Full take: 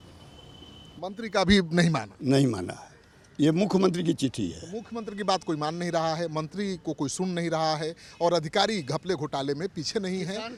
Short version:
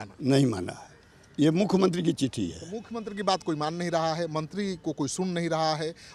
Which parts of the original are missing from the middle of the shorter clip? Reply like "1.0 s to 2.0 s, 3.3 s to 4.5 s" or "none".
none